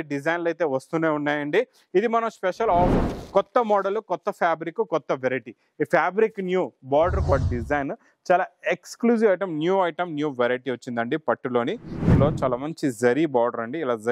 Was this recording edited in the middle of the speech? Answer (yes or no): yes